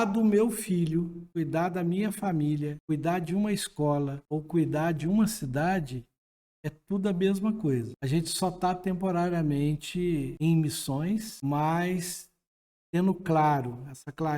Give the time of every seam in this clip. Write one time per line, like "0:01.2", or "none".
0:01.2
0:02.8
0:04.2
0:07.9
0:10.3
0:11.3